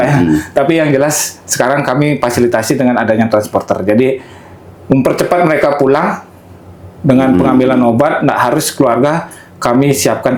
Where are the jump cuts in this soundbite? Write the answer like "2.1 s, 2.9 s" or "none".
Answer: none